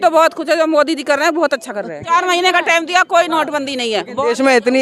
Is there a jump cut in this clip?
yes; 1 cut; at 2.0 s

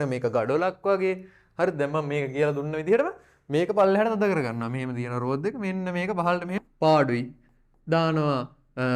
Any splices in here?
yes; 1 cut; at 6.6 s

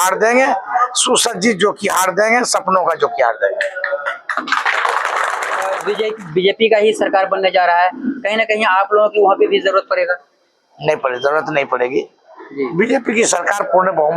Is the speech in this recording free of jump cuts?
no; 1 cut; at 5.8 s

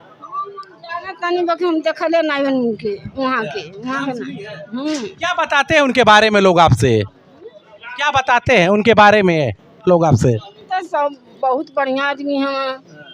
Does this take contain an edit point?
no; 0 cuts

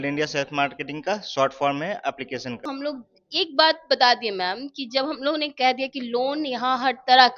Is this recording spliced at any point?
yes; 1 cut; at 2.7 s

